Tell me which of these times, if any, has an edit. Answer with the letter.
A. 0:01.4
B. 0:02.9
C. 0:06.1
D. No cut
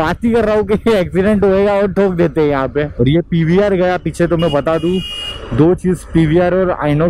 B